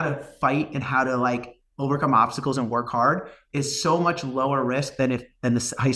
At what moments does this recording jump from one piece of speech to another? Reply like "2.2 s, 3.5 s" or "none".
none

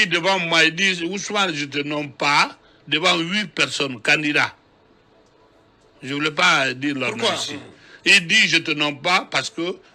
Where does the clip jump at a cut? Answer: none

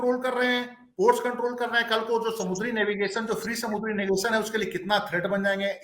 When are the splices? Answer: none

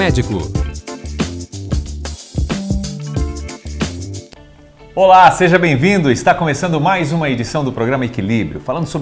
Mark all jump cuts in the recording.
4.2 s

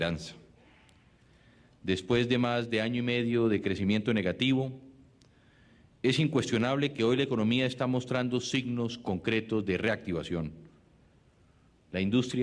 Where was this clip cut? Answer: 9.4 s

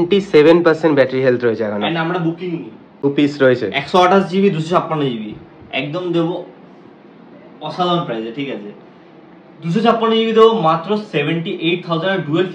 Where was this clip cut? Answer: 3.0 s

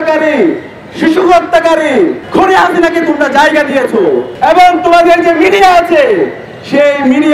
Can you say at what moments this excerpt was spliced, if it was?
2.2 s, 4.3 s

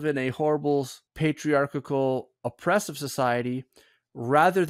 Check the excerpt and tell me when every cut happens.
1.0 s

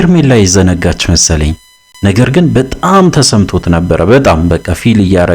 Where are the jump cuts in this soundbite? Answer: 1.9 s

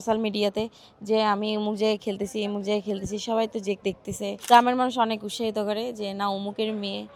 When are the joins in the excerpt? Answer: 4.4 s

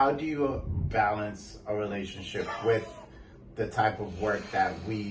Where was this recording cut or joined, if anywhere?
none

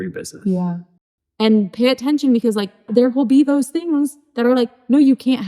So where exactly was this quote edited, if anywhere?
1.1 s, 2.8 s

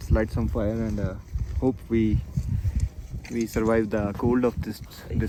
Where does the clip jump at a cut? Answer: none

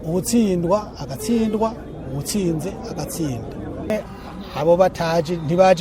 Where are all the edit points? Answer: 3.9 s

